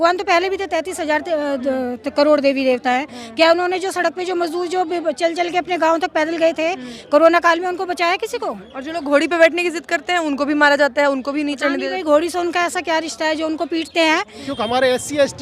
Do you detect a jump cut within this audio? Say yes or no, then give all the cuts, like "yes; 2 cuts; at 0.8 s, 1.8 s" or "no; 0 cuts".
yes; 1 cut; at 14.4 s